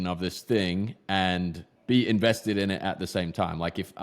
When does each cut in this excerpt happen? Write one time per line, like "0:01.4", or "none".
0:01.7